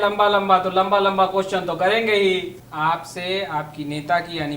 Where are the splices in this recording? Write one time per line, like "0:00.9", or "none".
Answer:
0:02.5